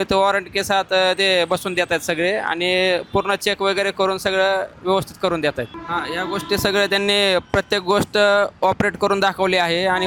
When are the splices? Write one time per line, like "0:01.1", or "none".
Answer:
0:05.8